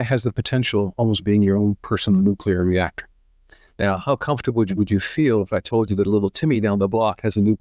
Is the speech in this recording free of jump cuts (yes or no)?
yes